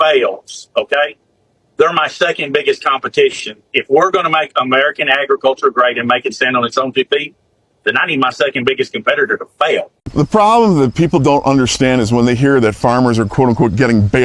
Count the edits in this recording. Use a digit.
0